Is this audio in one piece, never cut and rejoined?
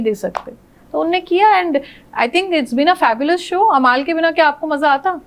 yes; 0 cuts

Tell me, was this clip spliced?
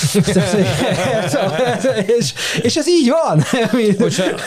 no; 0 cuts

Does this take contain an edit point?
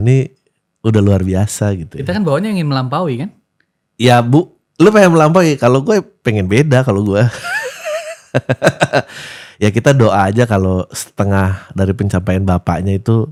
no; 0 cuts

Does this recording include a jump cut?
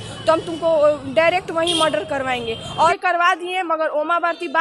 yes; 1 cut; at 2.9 s

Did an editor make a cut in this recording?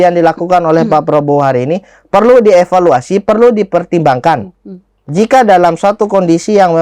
no; 0 cuts

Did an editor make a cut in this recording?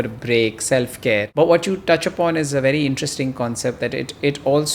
yes; 1 cut; at 1.3 s

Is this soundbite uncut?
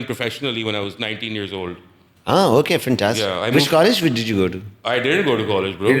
yes; 0 cuts

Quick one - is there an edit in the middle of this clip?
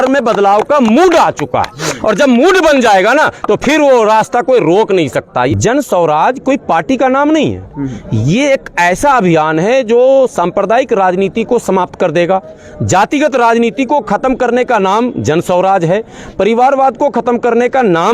yes; 1 cut; at 5.5 s

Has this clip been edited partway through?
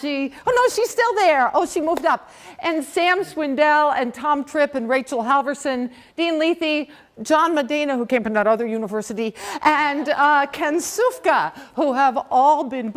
yes; 1 cut; at 5.4 s

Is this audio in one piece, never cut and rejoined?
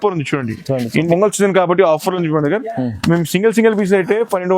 no; 1 cut; at 1.1 s

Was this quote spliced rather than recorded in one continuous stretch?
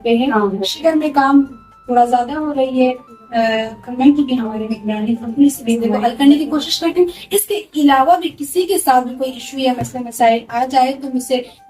yes; 1 cut; at 5.9 s

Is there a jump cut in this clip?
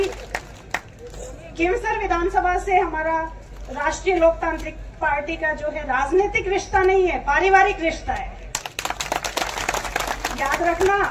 no; 0 cuts

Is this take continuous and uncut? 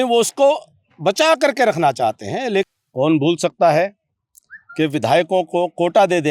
no; 1 cut; at 2.7 s

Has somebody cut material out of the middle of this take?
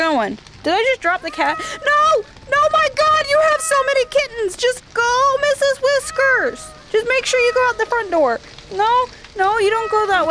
no; 0 cuts

